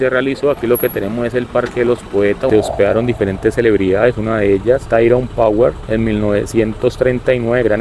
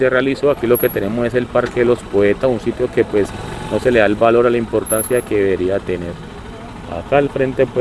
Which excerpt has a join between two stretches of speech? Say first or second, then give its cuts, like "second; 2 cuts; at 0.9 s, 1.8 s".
first; 1 cut; at 2.5 s